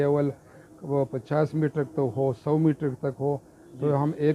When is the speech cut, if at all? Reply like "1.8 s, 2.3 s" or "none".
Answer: none